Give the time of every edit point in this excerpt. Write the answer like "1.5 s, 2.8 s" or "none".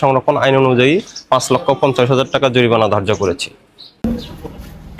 4.0 s